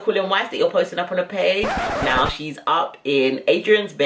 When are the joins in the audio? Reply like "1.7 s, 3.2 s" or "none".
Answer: 1.7 s